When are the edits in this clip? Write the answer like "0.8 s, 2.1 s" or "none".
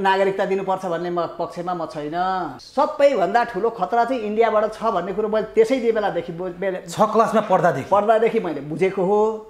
2.6 s